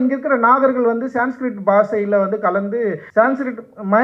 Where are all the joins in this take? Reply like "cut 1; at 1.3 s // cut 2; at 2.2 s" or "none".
cut 1; at 3.0 s